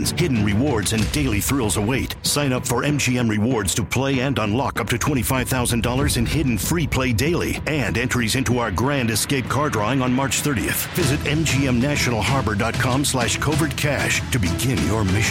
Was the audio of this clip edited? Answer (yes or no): no